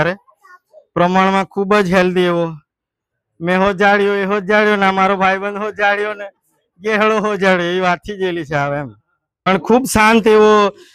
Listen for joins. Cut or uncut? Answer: cut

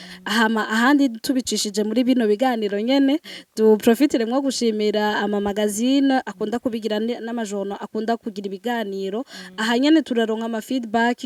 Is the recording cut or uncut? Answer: uncut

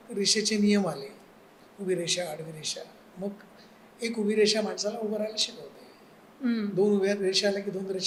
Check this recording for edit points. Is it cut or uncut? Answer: uncut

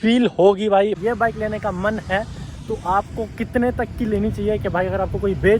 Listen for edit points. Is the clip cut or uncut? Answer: cut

